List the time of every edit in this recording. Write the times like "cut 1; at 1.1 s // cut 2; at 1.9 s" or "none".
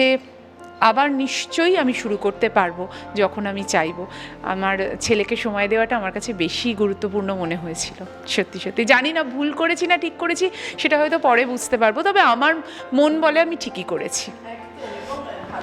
none